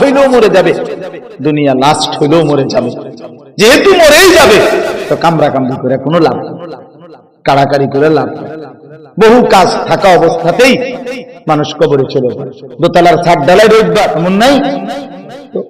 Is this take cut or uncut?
cut